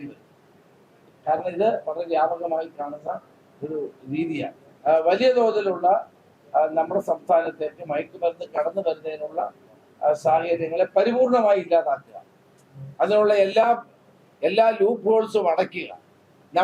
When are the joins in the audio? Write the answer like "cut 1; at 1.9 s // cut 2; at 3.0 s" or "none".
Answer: cut 1; at 4.7 s